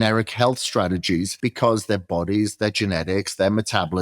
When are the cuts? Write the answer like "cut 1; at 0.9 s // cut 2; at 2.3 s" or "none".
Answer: cut 1; at 1.3 s

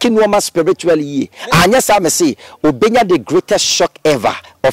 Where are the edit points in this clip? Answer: none

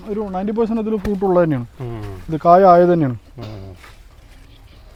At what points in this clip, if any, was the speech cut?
none

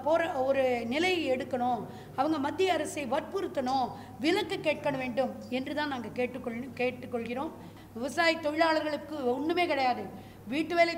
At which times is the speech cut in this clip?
cut 1; at 7.7 s

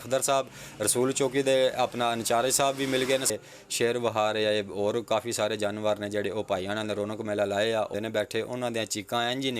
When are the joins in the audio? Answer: cut 1; at 3.3 s // cut 2; at 7.9 s

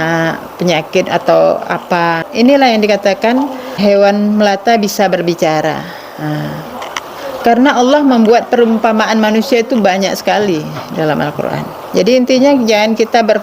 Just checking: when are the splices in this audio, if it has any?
cut 1; at 2.2 s // cut 2; at 3.8 s // cut 3; at 6.8 s

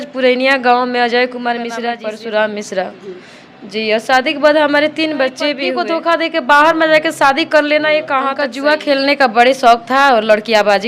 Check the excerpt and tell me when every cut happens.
cut 1; at 1.9 s // cut 2; at 5.6 s // cut 3; at 8.5 s

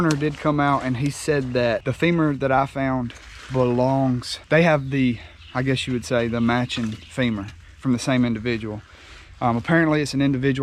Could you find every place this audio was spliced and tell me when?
cut 1; at 1.9 s // cut 2; at 4.3 s

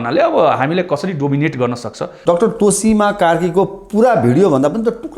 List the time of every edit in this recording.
cut 1; at 2.2 s

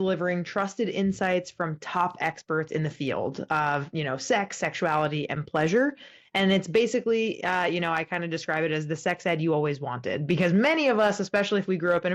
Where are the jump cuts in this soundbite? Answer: none

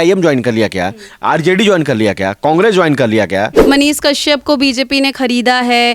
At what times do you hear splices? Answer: cut 1; at 3.6 s

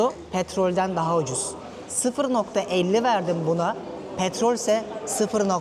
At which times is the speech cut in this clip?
none

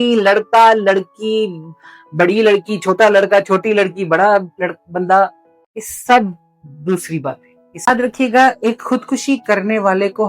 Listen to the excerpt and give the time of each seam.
cut 1; at 7.9 s

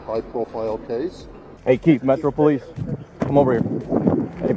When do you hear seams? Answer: cut 1; at 1.4 s

